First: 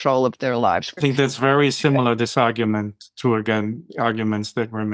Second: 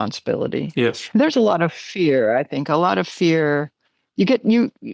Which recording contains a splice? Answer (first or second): first